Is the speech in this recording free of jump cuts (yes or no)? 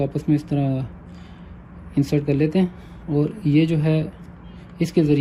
yes